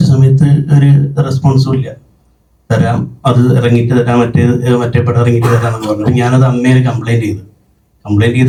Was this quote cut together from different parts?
no; 0 cuts

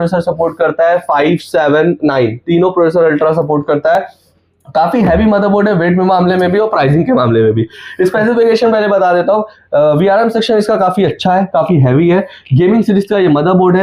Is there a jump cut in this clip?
no; 0 cuts

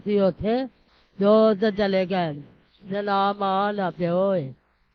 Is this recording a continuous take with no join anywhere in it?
yes; 0 cuts

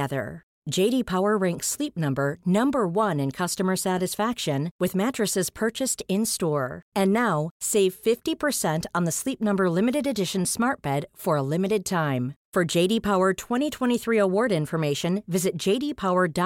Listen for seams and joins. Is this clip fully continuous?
yes; 0 cuts

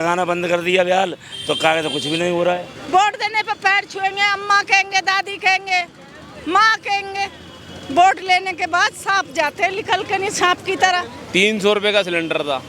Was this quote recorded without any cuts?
no; 2 cuts; at 2.7 s, 11.1 s

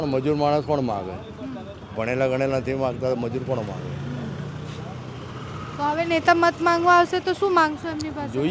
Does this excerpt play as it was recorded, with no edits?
yes; 0 cuts

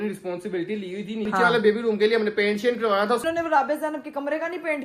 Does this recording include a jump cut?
yes; 2 cuts; at 1.3 s, 3.2 s

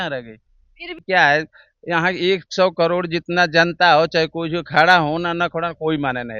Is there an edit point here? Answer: yes; 1 cut; at 0.9 s

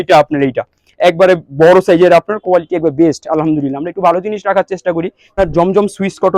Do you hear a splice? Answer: yes; 1 cut; at 5.3 s

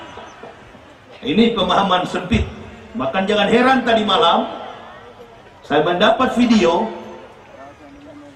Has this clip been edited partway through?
no; 0 cuts

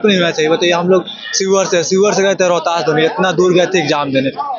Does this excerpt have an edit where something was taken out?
no; 0 cuts

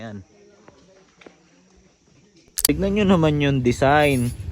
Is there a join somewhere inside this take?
yes; 1 cut; at 2.6 s

